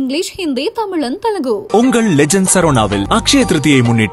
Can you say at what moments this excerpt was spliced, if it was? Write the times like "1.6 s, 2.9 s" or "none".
none